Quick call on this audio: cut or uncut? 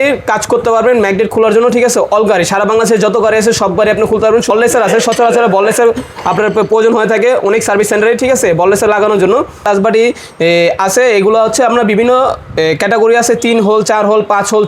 cut